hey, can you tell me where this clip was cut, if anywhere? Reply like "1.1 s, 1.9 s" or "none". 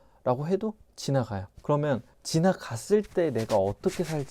none